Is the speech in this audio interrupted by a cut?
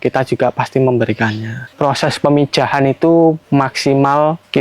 yes; 1 cut; at 1.7 s

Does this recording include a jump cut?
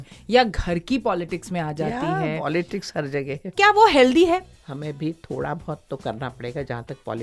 yes; 2 cuts; at 3.5 s, 4.5 s

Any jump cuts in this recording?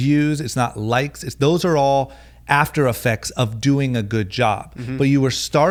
no; 0 cuts

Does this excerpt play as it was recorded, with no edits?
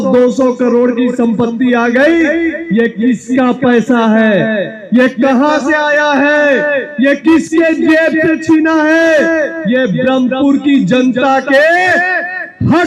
yes; 0 cuts

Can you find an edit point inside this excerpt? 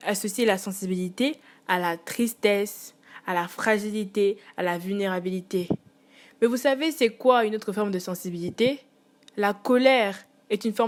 no; 0 cuts

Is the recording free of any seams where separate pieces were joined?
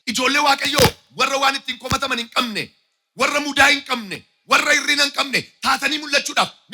yes; 0 cuts

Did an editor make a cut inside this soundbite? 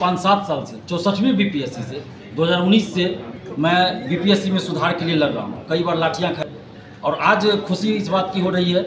yes; 1 cut; at 6.4 s

